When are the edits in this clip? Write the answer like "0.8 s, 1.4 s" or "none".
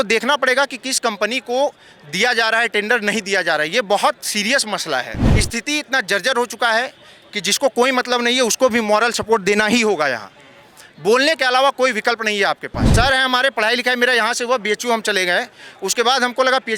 5.4 s, 12.9 s

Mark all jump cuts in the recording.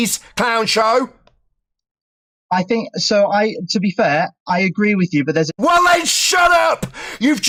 none

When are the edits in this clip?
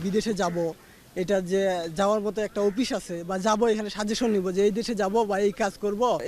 none

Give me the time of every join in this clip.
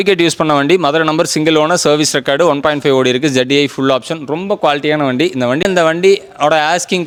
none

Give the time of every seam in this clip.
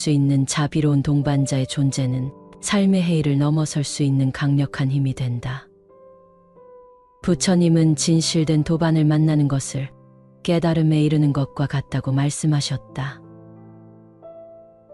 5.6 s, 7.2 s, 13.1 s

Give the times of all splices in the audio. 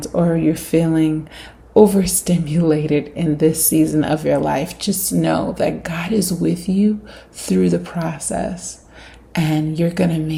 none

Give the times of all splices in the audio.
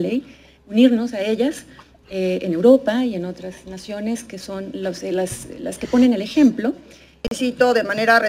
7.3 s

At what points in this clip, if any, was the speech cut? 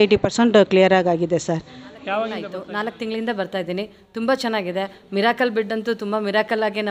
2.6 s

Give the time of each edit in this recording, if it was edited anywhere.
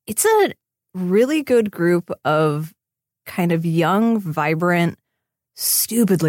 none

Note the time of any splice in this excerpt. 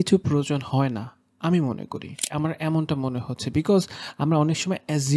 2.2 s

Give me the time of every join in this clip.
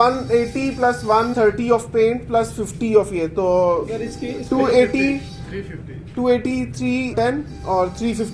1.3 s

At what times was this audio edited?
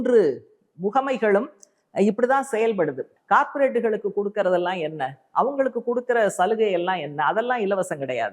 3.1 s

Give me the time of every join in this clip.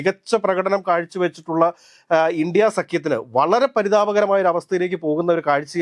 none

